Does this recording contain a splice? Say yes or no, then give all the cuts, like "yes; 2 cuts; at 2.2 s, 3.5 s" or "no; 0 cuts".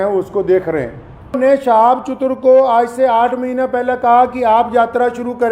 yes; 1 cut; at 1.4 s